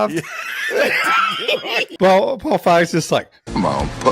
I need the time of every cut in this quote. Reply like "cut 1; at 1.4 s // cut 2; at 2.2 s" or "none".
cut 1; at 1.9 s